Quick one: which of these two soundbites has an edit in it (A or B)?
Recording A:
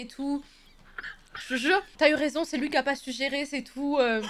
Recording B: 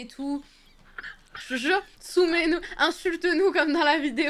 A